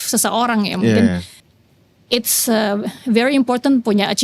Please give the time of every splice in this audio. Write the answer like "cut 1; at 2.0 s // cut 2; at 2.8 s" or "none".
cut 1; at 1.4 s